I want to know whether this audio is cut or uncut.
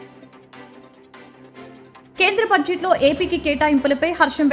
cut